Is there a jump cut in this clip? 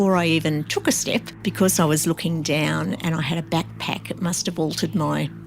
yes; 1 cut; at 1.3 s

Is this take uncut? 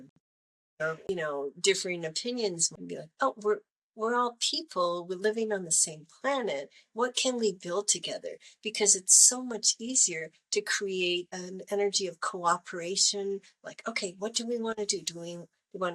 no; 2 cuts; at 1.1 s, 2.6 s

